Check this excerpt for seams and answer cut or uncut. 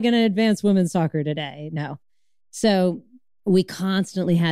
uncut